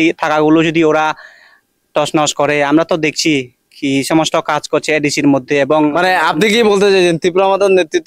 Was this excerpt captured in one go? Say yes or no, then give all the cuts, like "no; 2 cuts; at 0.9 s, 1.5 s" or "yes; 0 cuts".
yes; 0 cuts